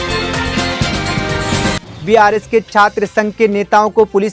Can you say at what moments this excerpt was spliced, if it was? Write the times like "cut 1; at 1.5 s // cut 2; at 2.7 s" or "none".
cut 1; at 1.9 s